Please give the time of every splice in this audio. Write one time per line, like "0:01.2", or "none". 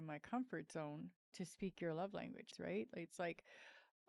0:01.2
0:02.5